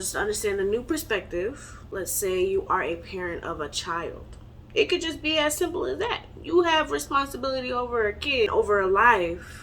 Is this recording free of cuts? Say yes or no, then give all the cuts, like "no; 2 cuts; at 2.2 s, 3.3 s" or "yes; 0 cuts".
no; 2 cuts; at 2.0 s, 8.5 s